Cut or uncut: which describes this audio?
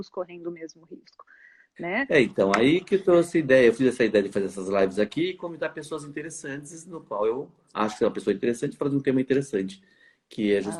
uncut